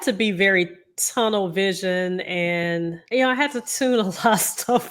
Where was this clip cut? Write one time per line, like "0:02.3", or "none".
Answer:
0:03.0